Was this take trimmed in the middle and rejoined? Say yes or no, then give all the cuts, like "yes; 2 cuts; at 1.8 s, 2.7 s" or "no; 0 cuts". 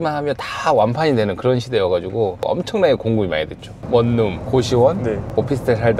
yes; 2 cuts; at 2.4 s, 3.8 s